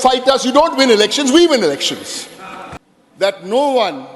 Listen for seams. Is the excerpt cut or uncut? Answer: cut